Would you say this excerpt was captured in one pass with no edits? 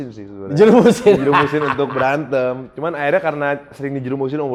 yes; 0 cuts

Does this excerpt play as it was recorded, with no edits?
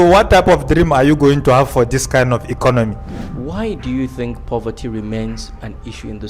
no; 1 cut; at 3.2 s

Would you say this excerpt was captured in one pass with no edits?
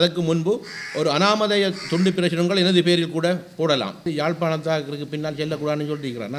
no; 1 cut; at 4.1 s

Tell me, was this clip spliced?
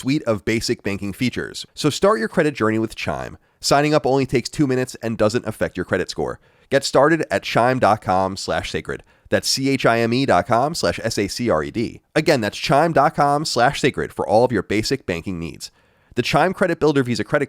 yes; 1 cut; at 1.5 s

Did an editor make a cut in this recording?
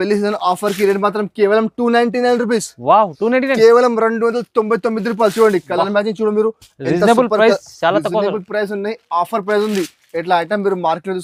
no; 0 cuts

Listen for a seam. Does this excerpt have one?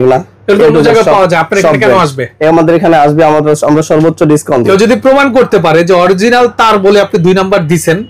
yes; 1 cut; at 4.7 s

